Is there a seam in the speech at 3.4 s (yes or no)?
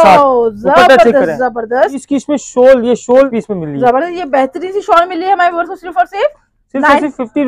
yes